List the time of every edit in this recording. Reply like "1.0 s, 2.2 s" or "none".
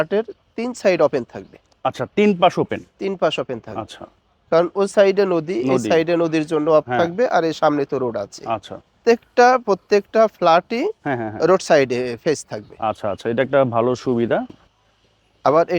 9.0 s, 14.6 s